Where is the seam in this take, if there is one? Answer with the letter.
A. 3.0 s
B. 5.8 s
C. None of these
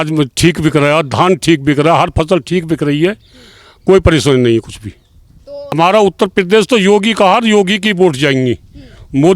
B